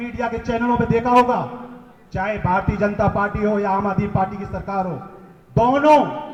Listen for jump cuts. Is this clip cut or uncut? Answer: uncut